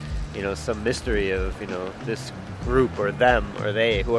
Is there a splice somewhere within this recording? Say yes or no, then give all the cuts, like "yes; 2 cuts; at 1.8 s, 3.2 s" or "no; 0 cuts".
no; 0 cuts